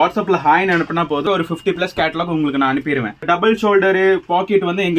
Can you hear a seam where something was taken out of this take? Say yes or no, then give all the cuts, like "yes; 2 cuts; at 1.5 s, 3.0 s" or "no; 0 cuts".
yes; 2 cuts; at 1.2 s, 3.2 s